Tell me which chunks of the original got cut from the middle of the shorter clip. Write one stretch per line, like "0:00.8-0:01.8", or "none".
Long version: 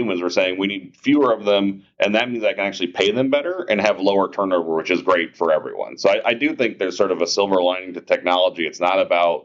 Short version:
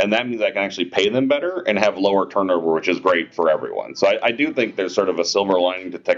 none